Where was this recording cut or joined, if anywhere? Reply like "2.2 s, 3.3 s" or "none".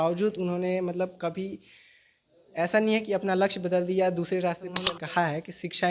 4.9 s